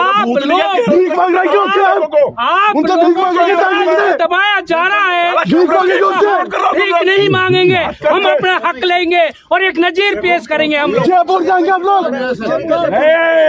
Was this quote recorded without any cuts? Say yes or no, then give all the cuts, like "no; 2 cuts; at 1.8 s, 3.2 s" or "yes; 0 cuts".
yes; 0 cuts